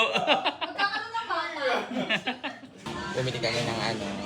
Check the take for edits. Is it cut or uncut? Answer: cut